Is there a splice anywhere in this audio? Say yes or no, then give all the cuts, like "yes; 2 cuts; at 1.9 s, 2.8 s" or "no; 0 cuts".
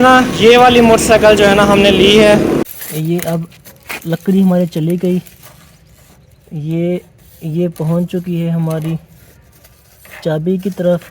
yes; 1 cut; at 2.6 s